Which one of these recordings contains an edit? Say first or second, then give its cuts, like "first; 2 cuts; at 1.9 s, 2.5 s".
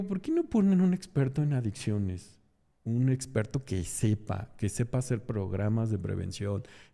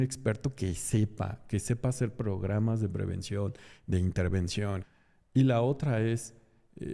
second; 1 cut; at 4.8 s